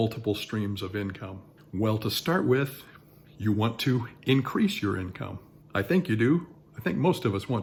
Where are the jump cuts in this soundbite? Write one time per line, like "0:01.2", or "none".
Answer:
none

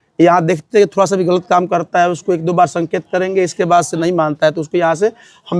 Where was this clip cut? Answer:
none

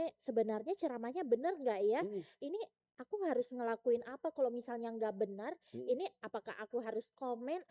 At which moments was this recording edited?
none

